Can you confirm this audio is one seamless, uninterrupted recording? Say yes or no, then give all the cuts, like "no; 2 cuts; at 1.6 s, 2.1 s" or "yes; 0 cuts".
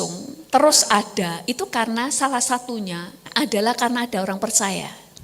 no; 1 cut; at 3.2 s